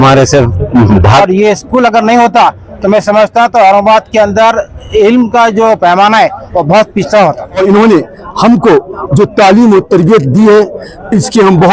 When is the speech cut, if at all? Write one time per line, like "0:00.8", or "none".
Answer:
0:01.2
0:07.6